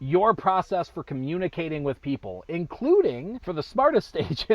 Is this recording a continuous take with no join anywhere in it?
no; 1 cut; at 3.3 s

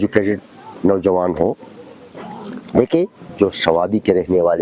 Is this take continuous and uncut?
no; 1 cut; at 3.3 s

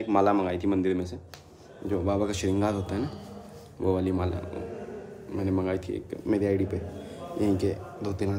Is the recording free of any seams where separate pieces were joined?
yes; 0 cuts

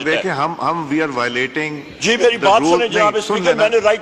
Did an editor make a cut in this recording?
no; 0 cuts

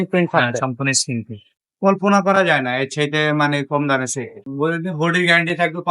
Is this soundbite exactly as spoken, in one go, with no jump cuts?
no; 2 cuts; at 1.5 s, 4.4 s

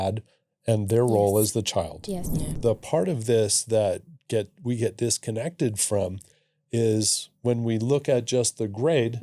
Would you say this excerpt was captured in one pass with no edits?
no; 1 cut; at 2.5 s

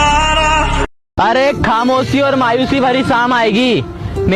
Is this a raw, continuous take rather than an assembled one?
yes; 0 cuts

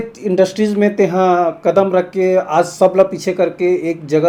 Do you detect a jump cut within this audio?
no; 0 cuts

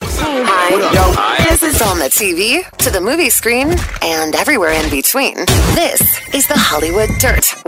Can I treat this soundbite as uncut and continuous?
yes; 0 cuts

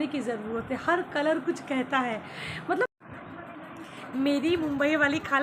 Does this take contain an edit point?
yes; 1 cut; at 3.0 s

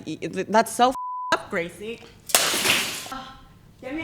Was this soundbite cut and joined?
yes; 1 cut; at 3.1 s

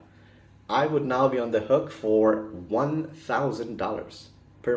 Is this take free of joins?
yes; 0 cuts

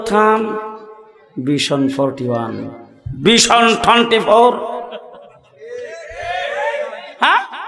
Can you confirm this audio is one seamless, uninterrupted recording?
yes; 0 cuts

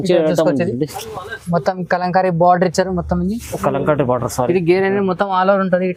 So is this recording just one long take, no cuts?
yes; 0 cuts

